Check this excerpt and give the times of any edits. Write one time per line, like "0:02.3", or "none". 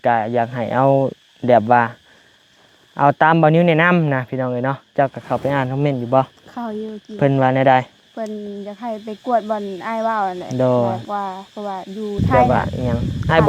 0:12.3